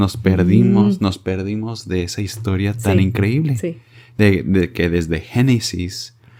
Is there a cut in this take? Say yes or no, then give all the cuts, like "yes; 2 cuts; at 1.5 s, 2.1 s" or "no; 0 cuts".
no; 0 cuts